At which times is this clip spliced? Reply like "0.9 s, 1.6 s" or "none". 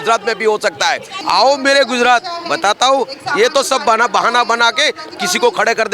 1.1 s